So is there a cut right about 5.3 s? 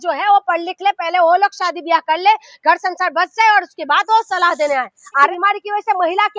yes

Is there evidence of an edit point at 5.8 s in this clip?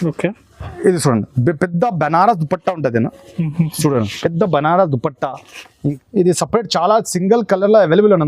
yes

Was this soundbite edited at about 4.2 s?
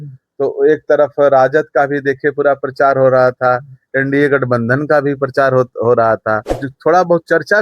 no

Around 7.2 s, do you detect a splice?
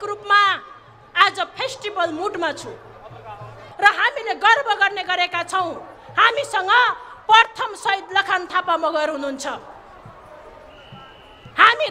no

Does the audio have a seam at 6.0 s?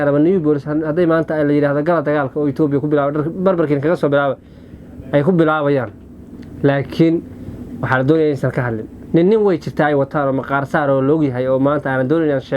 no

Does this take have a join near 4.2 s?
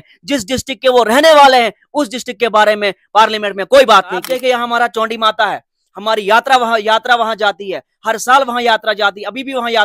yes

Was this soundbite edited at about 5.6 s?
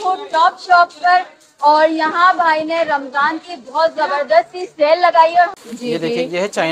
yes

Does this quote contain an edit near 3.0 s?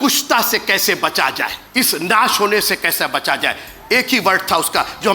no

